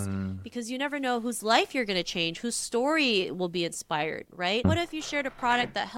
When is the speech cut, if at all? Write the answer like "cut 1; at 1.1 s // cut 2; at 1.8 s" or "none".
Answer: cut 1; at 4.6 s